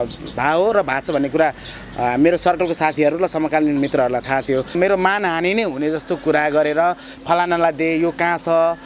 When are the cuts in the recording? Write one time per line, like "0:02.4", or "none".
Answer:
0:04.7

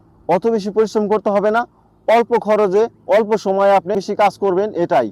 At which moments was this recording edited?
0:04.0

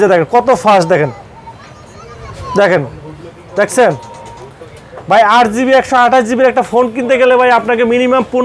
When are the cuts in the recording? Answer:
none

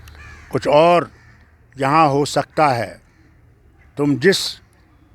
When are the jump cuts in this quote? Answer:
none

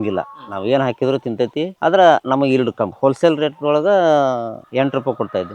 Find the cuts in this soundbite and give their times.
0:02.9

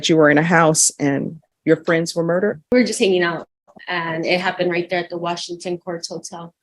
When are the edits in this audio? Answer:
0:02.6

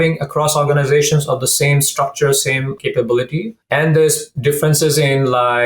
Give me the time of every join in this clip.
0:02.7
0:03.6

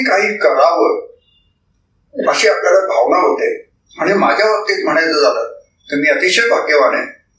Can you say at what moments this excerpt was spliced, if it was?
0:03.7

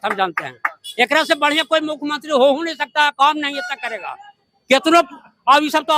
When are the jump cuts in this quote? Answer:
none

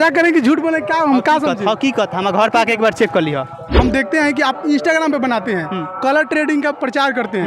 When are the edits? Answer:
0:03.7

